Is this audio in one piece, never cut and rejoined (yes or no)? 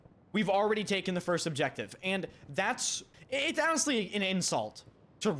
no